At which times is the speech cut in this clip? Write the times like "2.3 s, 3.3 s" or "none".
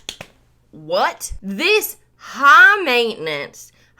1.3 s